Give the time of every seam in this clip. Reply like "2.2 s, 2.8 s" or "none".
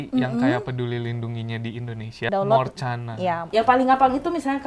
2.1 s, 3.5 s